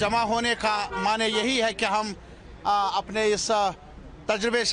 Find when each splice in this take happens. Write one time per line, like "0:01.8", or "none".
none